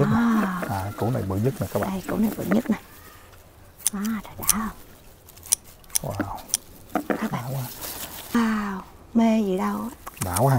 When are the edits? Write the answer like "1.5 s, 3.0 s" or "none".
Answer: 8.3 s

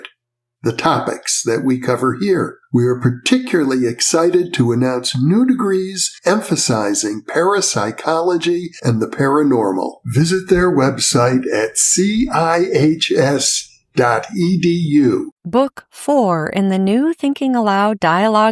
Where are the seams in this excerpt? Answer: 15.4 s

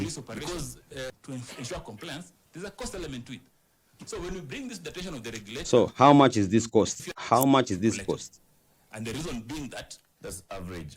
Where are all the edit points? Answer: 1.1 s

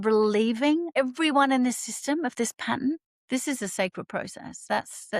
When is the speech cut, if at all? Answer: 1.0 s, 3.1 s

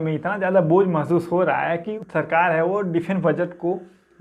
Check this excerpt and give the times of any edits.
1.9 s

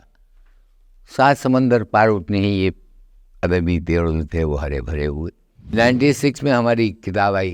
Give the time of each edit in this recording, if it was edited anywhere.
5.7 s

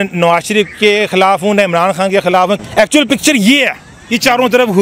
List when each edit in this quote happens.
2.6 s

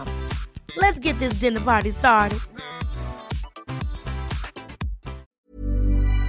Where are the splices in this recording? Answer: 5.3 s

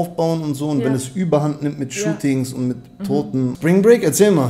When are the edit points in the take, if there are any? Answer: 3.6 s

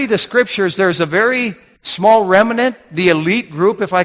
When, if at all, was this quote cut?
1.2 s

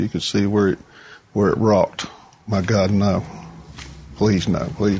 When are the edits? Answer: 2.2 s

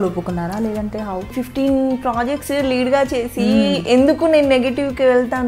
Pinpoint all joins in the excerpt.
1.3 s

